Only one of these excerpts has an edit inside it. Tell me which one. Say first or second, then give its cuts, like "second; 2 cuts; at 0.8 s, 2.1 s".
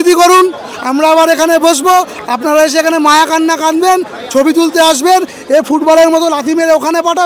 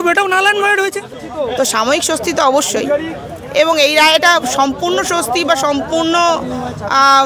second; 1 cut; at 1.2 s